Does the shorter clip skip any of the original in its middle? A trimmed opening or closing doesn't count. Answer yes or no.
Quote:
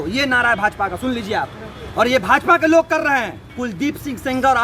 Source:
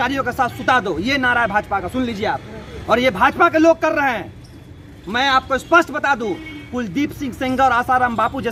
yes